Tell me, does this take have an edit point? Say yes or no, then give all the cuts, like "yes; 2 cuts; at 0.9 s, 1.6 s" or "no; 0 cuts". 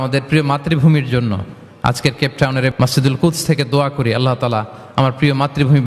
yes; 1 cut; at 2.7 s